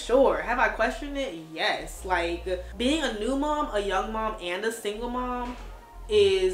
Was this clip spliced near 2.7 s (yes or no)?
yes